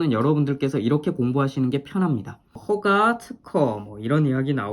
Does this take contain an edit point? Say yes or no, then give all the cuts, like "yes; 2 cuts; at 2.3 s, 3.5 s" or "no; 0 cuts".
yes; 1 cut; at 2.6 s